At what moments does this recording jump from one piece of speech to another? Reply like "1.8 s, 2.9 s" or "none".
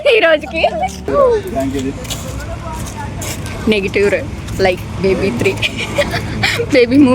1.1 s